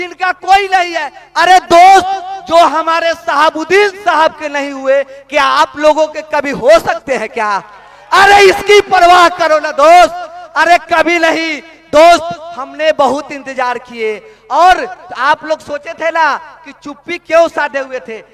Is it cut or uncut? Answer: uncut